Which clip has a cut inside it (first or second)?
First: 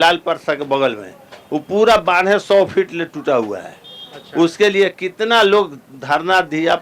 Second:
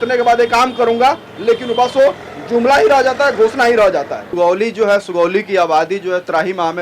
second